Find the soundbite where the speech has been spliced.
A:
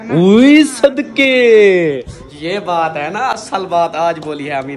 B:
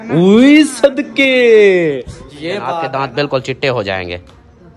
B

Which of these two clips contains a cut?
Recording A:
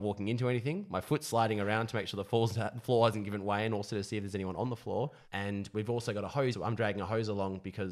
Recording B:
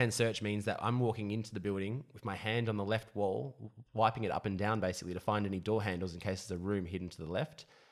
A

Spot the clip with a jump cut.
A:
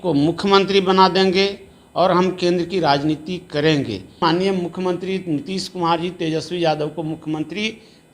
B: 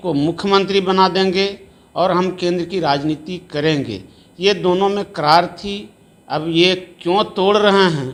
A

